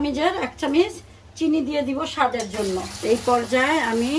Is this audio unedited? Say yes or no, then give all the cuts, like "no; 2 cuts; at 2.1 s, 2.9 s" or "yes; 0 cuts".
no; 1 cut; at 2.9 s